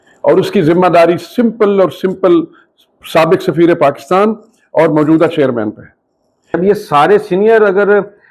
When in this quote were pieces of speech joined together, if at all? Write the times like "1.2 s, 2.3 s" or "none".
6.6 s